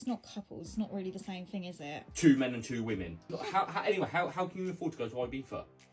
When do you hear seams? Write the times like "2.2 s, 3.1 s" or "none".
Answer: 3.4 s